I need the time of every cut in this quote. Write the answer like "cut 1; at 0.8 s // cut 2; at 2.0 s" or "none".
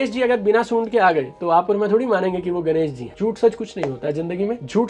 cut 1; at 3.0 s